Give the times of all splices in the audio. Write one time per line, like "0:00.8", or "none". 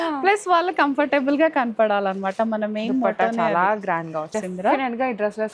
0:04.2